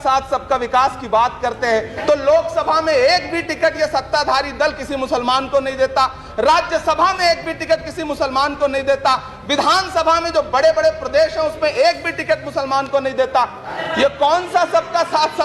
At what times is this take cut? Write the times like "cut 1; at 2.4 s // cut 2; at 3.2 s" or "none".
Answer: cut 1; at 1.9 s // cut 2; at 13.7 s